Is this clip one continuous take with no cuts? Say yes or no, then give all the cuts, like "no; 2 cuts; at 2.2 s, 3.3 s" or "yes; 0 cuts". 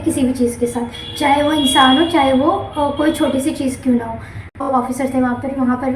no; 1 cut; at 4.6 s